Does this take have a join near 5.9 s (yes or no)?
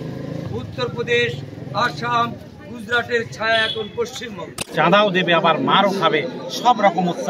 no